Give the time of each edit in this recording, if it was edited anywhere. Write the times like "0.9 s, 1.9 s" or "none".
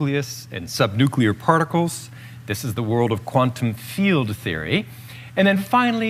2.9 s